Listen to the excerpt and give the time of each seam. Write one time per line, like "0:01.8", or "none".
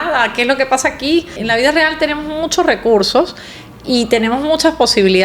0:01.4